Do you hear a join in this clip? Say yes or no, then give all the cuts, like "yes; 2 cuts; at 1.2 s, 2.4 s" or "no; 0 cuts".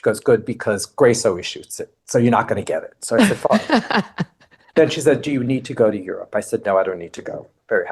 no; 0 cuts